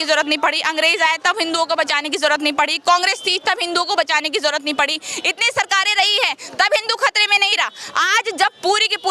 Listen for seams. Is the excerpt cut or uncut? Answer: uncut